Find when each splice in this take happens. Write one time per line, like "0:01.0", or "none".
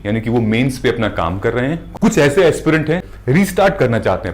0:01.8
0:03.0